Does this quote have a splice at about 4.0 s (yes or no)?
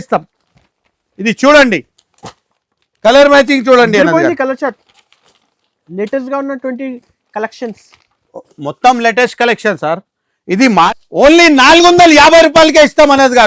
no